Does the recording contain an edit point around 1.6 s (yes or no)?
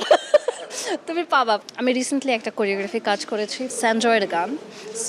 yes